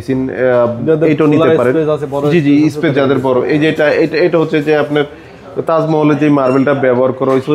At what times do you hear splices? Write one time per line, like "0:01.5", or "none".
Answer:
none